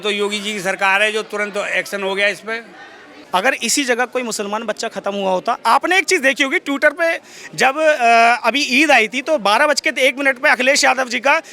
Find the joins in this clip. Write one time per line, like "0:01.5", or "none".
0:03.1